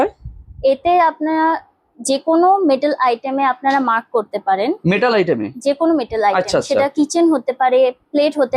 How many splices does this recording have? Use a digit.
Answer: 0